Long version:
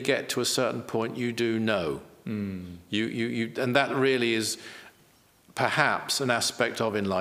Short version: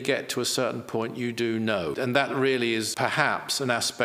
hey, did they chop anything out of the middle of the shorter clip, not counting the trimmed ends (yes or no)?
yes